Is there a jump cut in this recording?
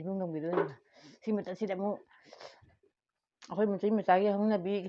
no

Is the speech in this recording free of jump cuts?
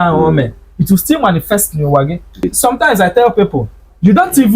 no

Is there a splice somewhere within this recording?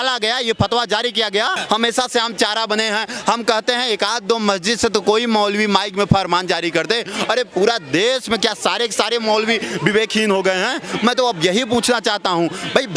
yes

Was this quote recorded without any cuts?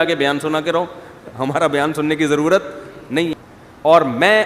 no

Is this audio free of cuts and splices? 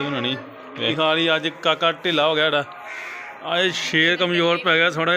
no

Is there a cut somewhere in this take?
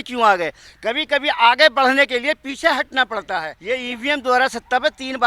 yes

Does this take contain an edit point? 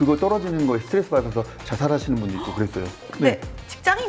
yes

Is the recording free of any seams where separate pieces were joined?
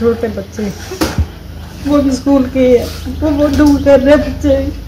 yes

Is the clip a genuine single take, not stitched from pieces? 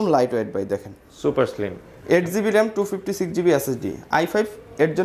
yes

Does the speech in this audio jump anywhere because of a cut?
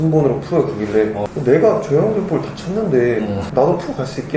yes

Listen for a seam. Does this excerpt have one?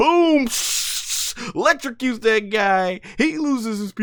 no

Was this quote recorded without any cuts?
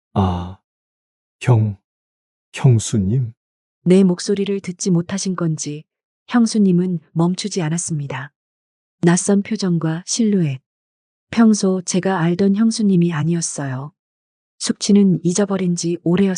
yes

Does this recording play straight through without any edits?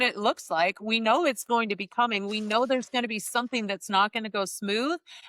yes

